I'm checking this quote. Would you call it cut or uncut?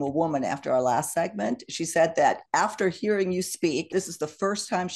cut